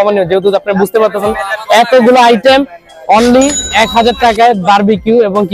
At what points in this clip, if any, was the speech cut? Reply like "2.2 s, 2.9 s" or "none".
none